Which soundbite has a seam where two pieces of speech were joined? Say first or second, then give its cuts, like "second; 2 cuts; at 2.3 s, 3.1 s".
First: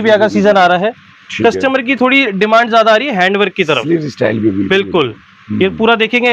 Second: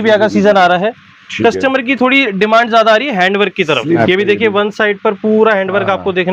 second; 1 cut; at 4.0 s